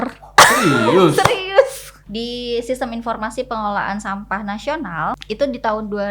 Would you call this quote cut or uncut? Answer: cut